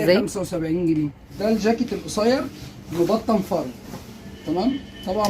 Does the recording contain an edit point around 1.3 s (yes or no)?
yes